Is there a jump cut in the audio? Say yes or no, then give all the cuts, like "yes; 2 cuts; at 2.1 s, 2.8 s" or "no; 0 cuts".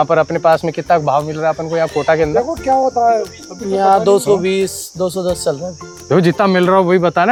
no; 0 cuts